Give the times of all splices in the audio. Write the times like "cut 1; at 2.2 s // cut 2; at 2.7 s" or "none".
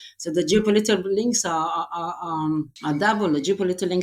cut 1; at 2.7 s

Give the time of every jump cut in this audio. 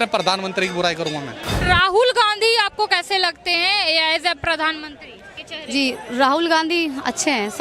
cut 1; at 1.6 s

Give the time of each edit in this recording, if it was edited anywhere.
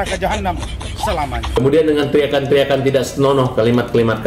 cut 1; at 1.6 s

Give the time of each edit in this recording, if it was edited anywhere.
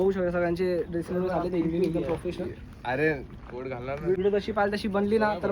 cut 1; at 4.2 s

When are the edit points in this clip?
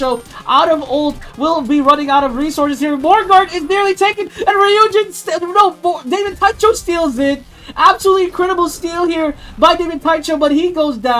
none

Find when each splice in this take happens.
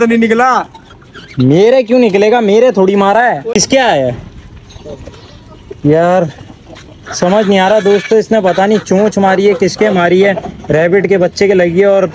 none

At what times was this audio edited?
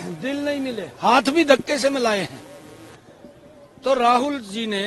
none

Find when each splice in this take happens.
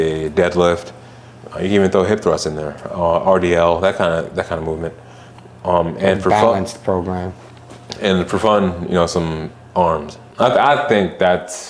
cut 1; at 10.2 s

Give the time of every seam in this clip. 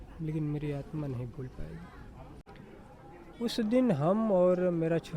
cut 1; at 2.4 s

